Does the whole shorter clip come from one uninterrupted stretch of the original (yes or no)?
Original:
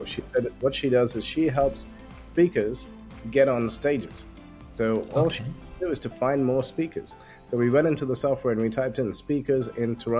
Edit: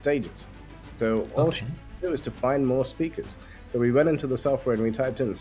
yes